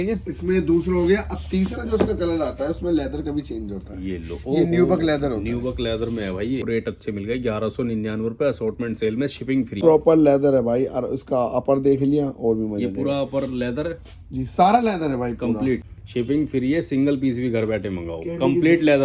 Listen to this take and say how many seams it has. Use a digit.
3